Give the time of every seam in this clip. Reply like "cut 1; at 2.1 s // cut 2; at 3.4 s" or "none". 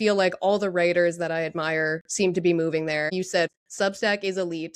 cut 1; at 3.4 s